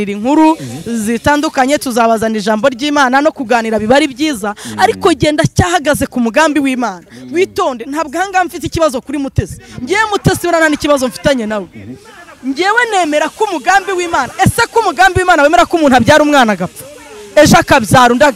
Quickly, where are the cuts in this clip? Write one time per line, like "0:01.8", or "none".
none